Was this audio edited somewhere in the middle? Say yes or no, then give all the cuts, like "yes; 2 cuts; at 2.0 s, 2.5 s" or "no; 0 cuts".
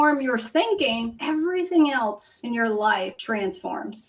yes; 3 cuts; at 1.1 s, 2.3 s, 3.2 s